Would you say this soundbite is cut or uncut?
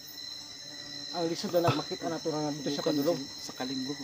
uncut